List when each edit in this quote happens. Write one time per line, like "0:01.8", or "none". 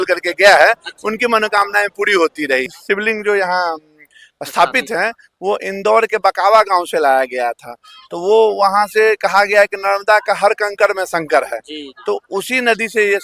0:02.7